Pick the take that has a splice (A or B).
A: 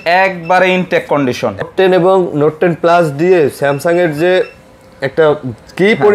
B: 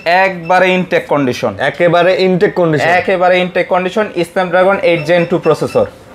A